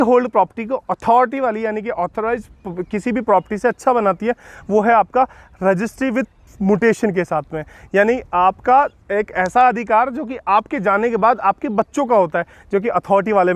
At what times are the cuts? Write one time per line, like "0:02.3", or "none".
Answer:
none